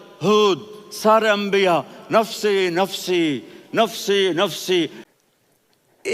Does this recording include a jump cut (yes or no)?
yes